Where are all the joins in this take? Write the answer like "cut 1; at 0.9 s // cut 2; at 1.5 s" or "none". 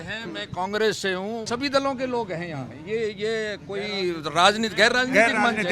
cut 1; at 1.4 s